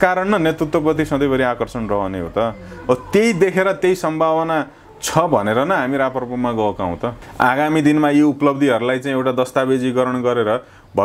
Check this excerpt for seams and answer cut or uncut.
cut